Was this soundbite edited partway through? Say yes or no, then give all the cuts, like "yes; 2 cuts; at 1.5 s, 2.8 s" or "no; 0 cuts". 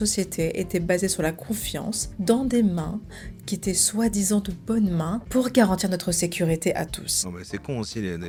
no; 0 cuts